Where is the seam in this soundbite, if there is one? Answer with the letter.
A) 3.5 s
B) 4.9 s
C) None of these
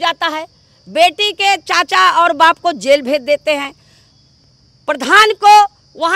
C